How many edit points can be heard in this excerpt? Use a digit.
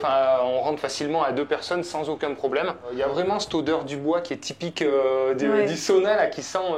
1